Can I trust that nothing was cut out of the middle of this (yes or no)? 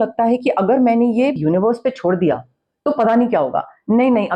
no